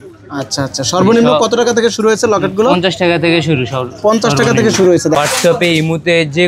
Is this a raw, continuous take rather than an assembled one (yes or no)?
no